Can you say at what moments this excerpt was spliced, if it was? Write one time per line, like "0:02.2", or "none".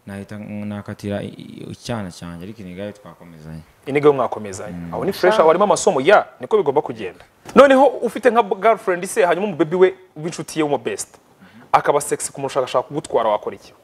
0:07.5